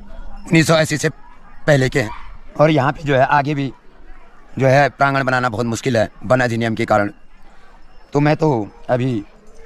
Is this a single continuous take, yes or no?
yes